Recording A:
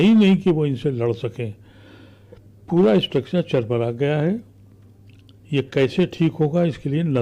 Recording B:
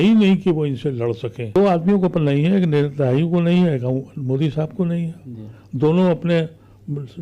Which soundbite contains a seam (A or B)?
B